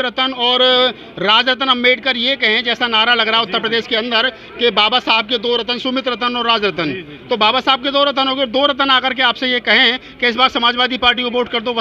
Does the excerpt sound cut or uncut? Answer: uncut